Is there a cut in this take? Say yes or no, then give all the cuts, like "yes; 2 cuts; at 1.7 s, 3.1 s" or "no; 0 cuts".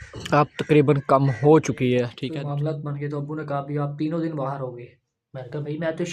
yes; 1 cut; at 2.1 s